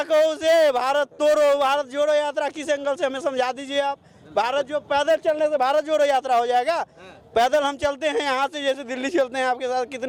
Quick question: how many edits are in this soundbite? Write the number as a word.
zero